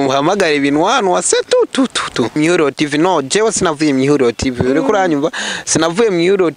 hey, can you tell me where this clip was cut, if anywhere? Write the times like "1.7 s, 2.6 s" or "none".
2.4 s